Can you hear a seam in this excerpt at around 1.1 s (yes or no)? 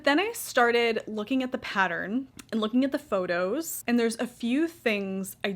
no